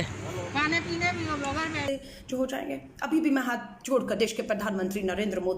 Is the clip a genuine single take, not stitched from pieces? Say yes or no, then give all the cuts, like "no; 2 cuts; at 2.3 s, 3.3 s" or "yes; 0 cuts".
no; 1 cut; at 1.9 s